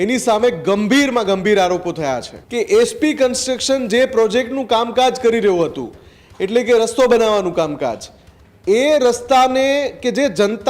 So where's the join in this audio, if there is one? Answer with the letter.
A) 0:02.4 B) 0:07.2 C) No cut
A